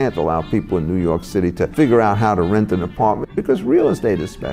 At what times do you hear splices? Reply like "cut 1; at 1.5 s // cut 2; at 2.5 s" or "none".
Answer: cut 1; at 1.7 s // cut 2; at 3.3 s